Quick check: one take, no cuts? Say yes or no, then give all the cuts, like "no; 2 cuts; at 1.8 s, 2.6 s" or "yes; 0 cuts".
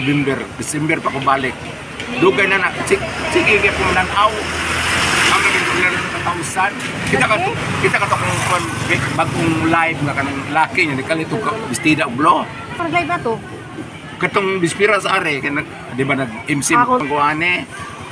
yes; 0 cuts